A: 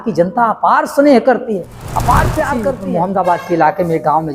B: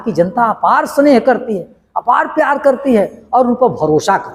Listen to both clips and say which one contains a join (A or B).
A